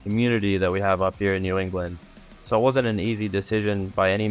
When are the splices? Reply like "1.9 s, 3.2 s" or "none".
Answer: 2.0 s